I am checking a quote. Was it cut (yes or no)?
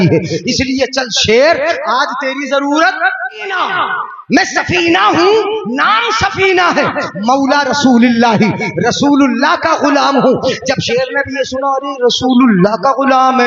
yes